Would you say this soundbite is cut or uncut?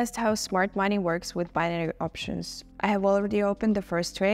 cut